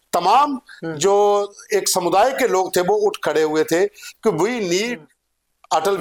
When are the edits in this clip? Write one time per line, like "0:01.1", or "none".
none